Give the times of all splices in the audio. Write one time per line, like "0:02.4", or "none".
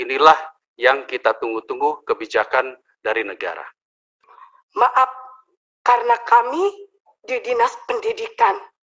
0:04.1